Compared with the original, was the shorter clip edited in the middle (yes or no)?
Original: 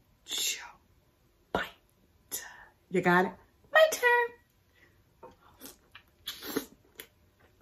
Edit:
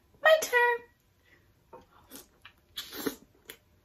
no